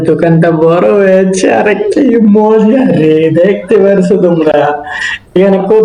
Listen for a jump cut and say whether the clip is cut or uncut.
uncut